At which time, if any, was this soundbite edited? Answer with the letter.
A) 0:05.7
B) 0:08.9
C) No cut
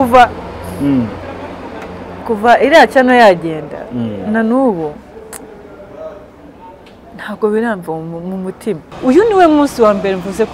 B